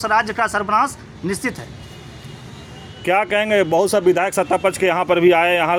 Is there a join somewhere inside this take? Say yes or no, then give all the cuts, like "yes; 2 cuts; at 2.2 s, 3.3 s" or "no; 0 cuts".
no; 0 cuts